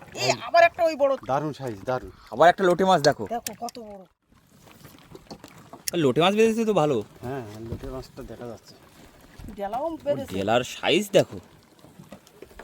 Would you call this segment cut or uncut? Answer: cut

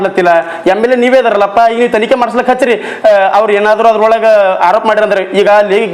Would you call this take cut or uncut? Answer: uncut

